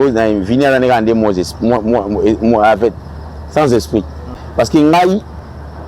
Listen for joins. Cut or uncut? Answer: cut